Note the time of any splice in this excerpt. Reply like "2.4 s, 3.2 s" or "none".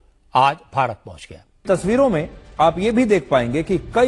1.6 s